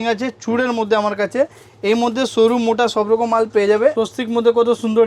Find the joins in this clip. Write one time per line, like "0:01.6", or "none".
0:03.9